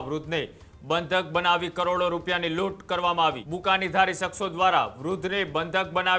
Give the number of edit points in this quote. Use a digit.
1